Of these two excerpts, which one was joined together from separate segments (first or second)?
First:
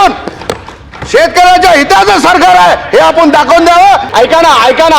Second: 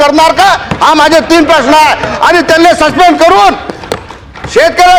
first